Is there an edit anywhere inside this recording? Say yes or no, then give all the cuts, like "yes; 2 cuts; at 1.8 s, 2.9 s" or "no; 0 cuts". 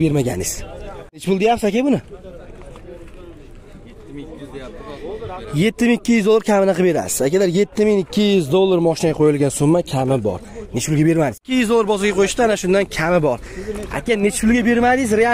yes; 2 cuts; at 1.2 s, 11.4 s